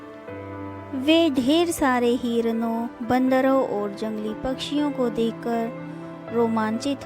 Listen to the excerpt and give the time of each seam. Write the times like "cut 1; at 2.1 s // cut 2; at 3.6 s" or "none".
cut 1; at 0.9 s